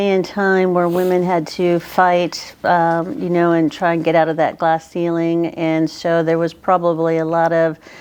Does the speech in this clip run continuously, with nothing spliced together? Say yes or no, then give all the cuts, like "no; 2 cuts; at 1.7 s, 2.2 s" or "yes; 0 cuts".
yes; 0 cuts